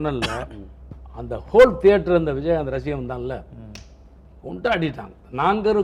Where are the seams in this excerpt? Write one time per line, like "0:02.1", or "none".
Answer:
none